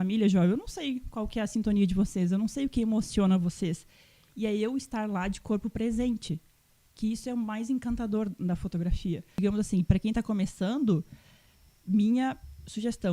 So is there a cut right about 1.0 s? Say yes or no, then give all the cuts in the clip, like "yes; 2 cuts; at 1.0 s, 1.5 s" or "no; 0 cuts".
no; 1 cut; at 9.4 s